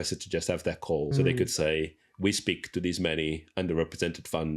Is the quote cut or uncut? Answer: cut